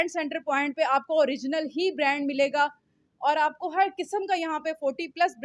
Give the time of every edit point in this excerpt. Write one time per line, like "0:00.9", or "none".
none